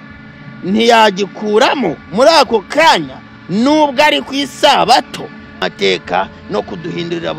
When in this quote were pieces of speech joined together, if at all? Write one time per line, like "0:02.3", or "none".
0:05.6